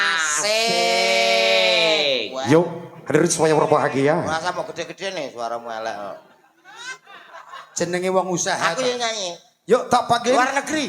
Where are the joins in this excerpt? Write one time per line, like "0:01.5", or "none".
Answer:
0:02.4